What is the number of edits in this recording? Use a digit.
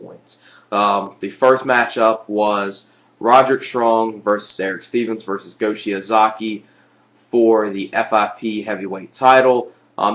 0